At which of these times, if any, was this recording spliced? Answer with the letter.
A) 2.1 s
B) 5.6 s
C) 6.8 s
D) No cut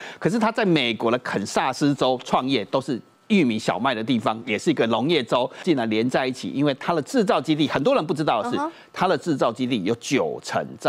B